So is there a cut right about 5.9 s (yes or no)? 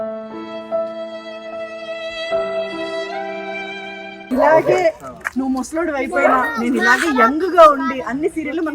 no